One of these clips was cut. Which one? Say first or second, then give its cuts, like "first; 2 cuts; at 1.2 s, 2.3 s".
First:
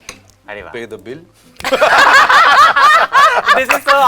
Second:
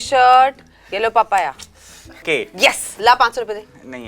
second; 1 cut; at 2.2 s